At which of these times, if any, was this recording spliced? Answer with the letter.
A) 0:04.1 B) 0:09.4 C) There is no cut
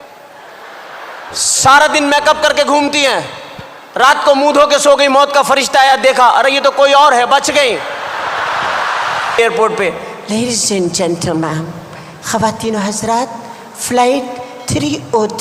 B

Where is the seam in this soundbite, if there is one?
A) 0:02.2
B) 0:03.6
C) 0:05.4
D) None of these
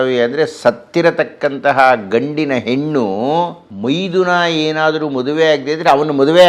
B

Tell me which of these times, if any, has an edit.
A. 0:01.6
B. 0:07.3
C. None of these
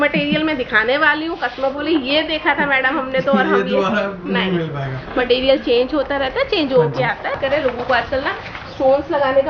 B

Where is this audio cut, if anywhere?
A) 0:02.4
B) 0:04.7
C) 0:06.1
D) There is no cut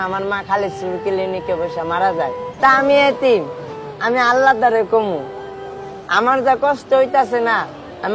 A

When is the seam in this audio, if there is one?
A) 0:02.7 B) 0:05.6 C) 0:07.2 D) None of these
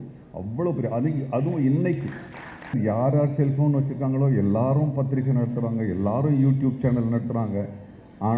A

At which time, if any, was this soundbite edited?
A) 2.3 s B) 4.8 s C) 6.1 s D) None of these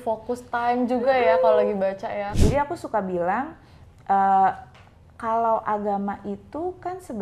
A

